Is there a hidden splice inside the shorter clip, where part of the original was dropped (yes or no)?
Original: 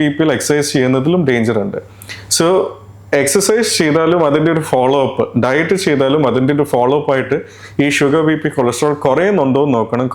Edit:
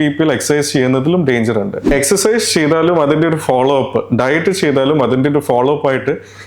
yes